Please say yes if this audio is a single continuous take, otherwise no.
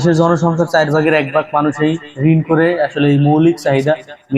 yes